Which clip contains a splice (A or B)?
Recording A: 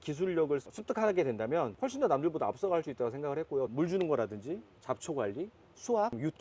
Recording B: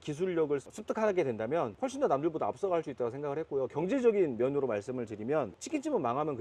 A